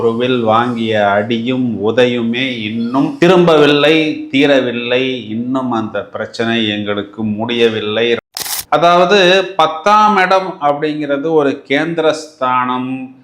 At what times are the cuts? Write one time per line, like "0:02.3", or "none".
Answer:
0:08.2

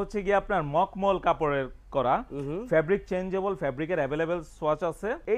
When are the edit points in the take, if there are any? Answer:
none

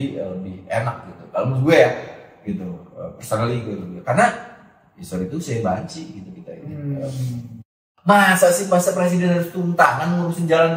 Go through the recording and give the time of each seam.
0:07.9

